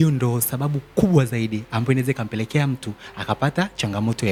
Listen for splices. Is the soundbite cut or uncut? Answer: uncut